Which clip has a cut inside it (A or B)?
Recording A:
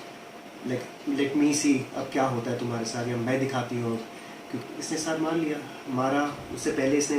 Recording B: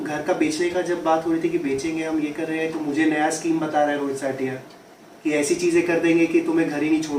A